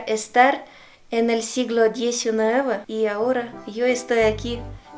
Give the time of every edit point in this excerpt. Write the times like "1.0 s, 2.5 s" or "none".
2.9 s